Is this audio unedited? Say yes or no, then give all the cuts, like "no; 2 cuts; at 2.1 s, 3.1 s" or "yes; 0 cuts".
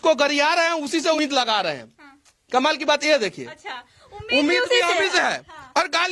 no; 1 cut; at 1.2 s